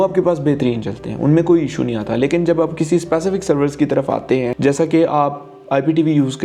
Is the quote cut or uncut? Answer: uncut